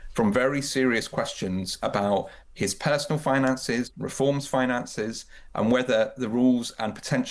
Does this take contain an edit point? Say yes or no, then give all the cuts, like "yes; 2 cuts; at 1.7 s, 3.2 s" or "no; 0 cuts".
no; 0 cuts